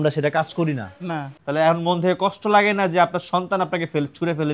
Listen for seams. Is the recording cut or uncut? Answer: cut